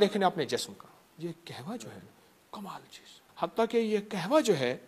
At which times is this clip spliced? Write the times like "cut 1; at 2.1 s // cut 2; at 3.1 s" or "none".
cut 1; at 1.1 s // cut 2; at 3.2 s